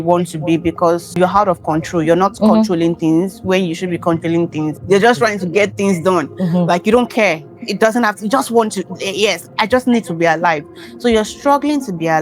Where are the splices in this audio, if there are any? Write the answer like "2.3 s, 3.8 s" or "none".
1.2 s, 4.8 s

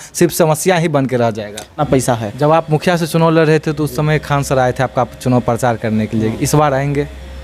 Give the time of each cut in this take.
1.8 s

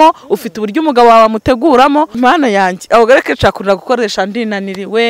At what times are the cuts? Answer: 2.1 s

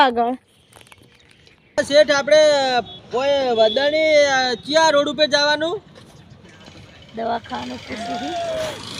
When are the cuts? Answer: 1.8 s

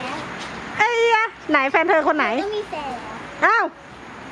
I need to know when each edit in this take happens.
none

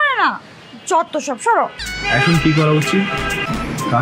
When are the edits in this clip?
1.9 s

